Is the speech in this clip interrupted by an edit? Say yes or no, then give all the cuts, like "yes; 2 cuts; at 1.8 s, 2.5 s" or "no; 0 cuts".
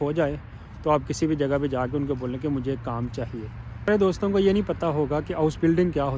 yes; 1 cut; at 3.9 s